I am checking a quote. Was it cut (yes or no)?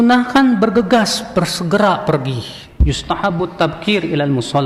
no